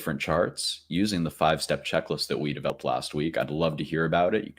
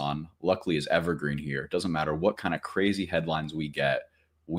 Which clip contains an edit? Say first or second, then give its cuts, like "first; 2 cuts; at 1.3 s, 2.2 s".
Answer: first; 1 cut; at 2.7 s